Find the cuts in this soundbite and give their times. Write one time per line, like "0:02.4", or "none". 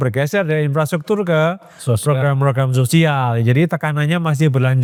none